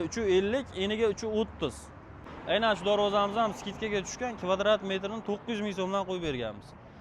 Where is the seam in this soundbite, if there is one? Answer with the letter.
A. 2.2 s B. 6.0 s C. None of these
A